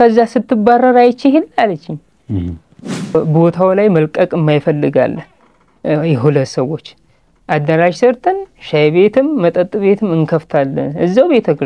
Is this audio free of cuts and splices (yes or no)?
no